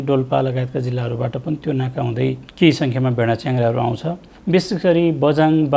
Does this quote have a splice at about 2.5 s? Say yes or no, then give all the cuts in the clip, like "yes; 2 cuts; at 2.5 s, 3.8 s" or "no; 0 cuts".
yes; 2 cuts; at 2.5 s, 4.3 s